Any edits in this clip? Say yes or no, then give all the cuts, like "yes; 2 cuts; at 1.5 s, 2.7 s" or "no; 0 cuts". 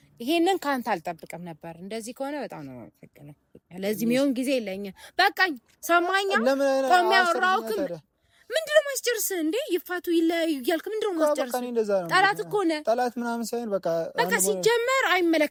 no; 0 cuts